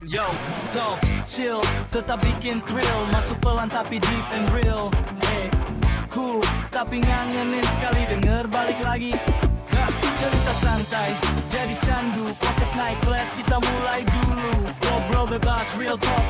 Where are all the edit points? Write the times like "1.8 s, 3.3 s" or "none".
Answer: none